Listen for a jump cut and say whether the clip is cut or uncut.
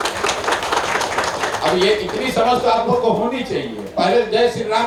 uncut